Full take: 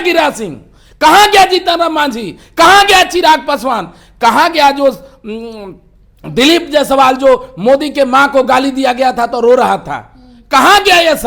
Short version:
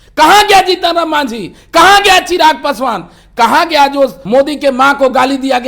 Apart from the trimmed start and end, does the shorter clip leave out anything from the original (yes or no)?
yes